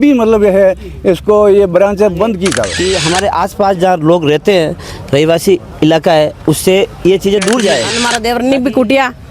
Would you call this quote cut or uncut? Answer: cut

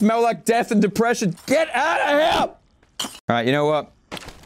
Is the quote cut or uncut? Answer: cut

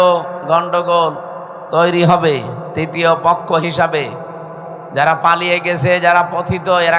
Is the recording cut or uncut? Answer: uncut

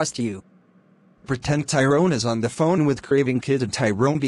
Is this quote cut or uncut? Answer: uncut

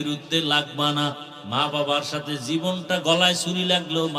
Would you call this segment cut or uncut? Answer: cut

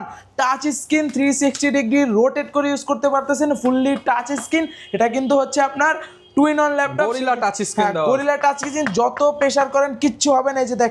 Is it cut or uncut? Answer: uncut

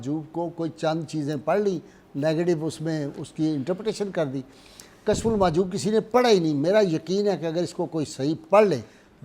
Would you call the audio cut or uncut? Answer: uncut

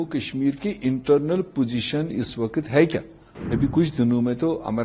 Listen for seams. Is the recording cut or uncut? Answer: cut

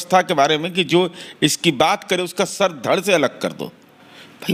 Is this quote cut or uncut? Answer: uncut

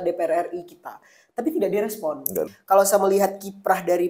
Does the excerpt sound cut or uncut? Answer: cut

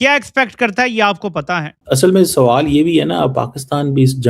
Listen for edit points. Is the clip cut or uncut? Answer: cut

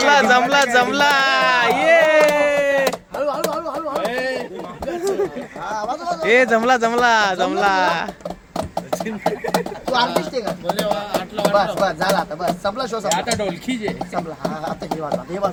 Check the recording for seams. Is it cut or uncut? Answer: uncut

